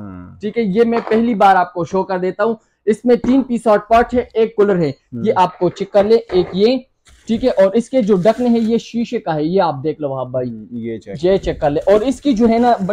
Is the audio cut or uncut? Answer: uncut